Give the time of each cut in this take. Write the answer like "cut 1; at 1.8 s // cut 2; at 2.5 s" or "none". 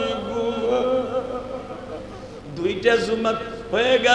cut 1; at 2.2 s